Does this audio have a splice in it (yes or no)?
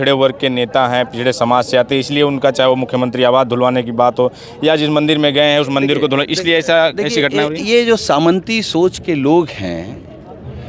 no